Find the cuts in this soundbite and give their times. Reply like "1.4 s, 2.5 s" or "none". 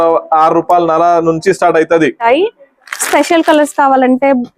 2.2 s

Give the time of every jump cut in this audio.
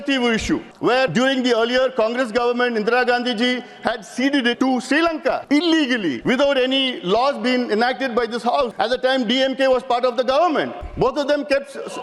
0.9 s, 4.5 s, 5.4 s, 6.2 s, 8.7 s, 10.8 s

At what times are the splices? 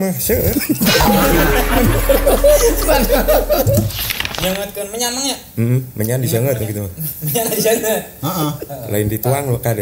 4.0 s

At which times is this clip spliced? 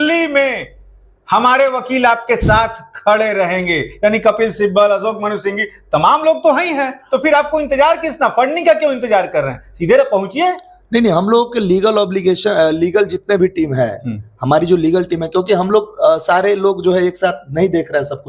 none

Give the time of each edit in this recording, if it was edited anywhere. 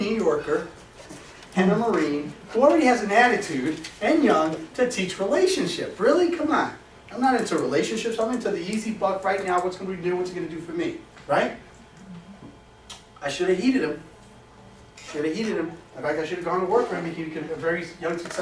3.3 s

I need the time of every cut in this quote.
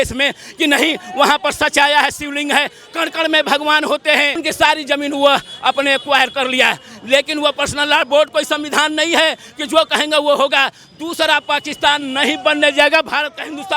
4.4 s

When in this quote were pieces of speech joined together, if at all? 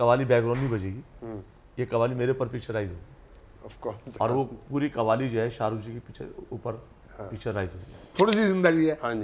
8.1 s

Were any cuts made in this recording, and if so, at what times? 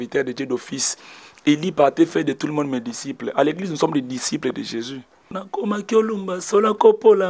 5.3 s

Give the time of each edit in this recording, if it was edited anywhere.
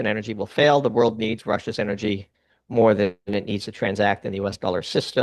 none

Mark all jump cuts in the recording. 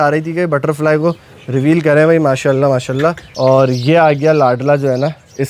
3.2 s

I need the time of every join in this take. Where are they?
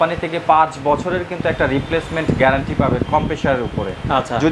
none

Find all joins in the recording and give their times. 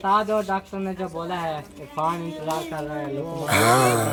none

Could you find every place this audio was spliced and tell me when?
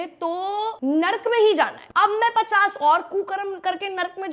0.8 s, 1.8 s

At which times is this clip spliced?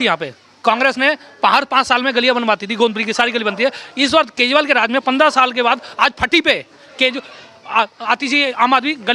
none

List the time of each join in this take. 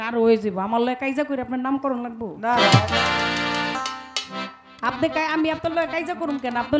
none

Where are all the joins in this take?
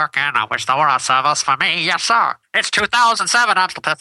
2.7 s

